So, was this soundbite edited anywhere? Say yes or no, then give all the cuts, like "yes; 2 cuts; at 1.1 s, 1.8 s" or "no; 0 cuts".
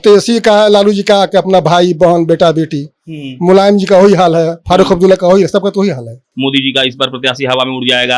yes; 1 cut; at 6.2 s